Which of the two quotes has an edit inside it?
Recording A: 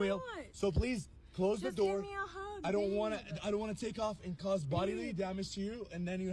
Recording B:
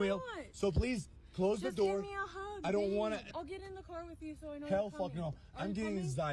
B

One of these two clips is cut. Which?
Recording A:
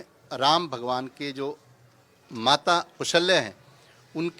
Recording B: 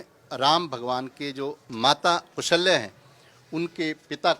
B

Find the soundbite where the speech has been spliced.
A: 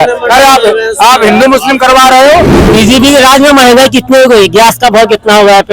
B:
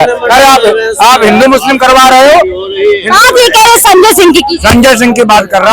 A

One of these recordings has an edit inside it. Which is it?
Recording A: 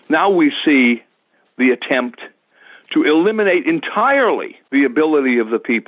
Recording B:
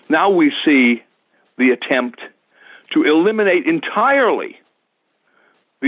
A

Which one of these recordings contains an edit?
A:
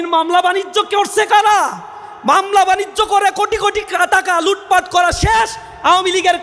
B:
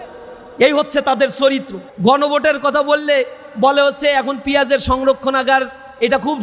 B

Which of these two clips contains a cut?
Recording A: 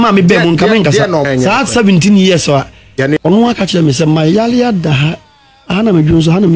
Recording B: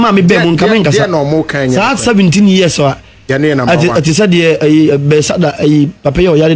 A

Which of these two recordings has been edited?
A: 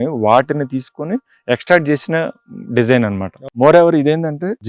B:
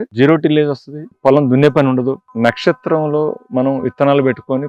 A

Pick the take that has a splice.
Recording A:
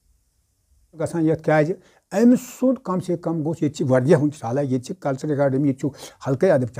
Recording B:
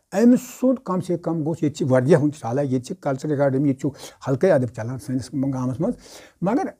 A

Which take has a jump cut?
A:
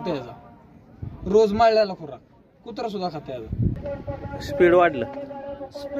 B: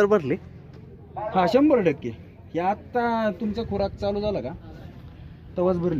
A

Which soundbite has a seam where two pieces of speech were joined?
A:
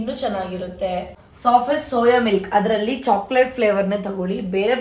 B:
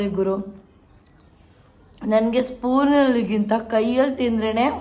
A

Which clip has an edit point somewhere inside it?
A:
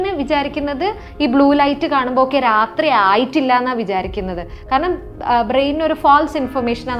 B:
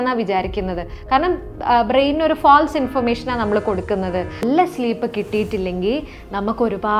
B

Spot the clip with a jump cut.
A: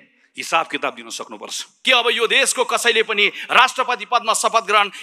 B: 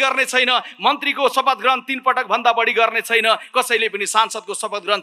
A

